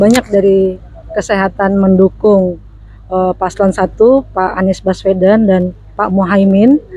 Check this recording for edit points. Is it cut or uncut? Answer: uncut